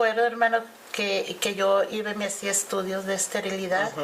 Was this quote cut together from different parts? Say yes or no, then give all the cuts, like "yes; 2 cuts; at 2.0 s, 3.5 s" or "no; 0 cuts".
no; 0 cuts